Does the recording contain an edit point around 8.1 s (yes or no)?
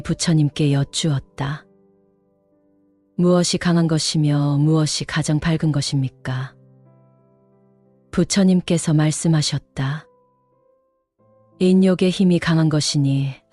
yes